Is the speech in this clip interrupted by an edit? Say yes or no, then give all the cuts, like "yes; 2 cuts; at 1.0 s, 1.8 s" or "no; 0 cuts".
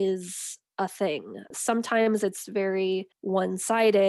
yes; 1 cut; at 3.1 s